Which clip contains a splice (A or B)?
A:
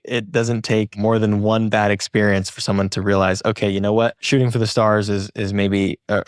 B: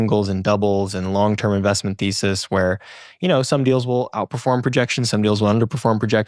A